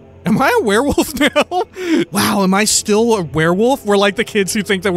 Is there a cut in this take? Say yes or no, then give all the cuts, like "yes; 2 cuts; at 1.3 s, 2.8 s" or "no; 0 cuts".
yes; 1 cut; at 2.1 s